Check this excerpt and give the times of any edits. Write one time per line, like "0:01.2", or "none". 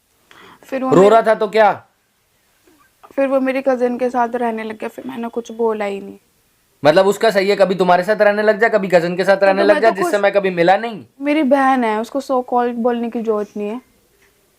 0:11.1